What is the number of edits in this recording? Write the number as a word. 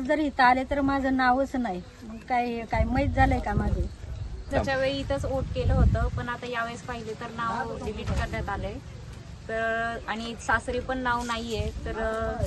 one